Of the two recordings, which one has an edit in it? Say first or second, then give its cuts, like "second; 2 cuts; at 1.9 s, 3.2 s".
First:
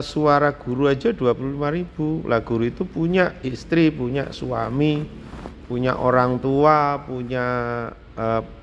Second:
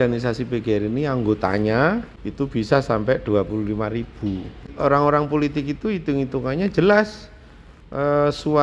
second; 2 cuts; at 2.1 s, 4.7 s